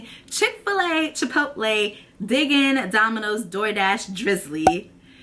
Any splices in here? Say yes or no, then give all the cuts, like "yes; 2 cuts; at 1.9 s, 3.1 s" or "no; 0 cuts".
no; 0 cuts